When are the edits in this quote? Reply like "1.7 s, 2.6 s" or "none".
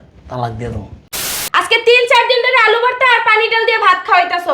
1.3 s